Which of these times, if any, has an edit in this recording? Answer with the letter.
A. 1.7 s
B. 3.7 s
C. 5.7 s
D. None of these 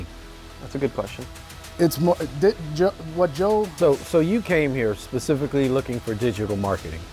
B